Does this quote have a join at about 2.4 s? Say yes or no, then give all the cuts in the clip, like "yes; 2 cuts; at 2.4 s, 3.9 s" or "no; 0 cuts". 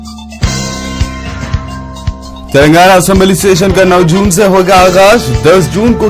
yes; 1 cut; at 2.4 s